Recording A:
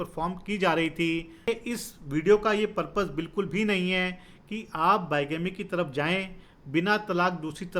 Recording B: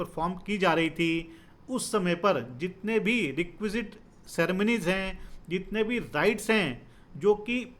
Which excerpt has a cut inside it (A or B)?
A